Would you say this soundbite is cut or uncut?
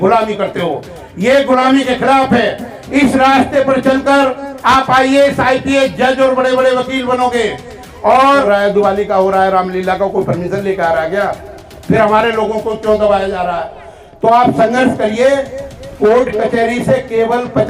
cut